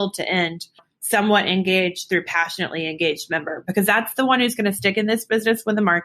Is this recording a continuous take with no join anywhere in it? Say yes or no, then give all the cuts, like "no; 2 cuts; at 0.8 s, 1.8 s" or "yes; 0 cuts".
no; 1 cut; at 0.9 s